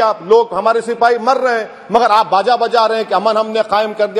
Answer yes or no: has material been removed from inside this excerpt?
no